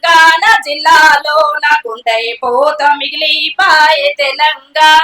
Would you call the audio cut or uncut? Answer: uncut